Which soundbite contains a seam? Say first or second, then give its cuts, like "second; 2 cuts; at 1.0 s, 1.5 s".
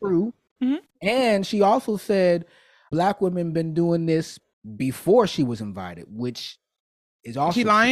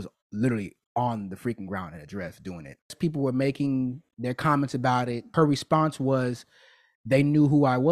second; 1 cut; at 3.0 s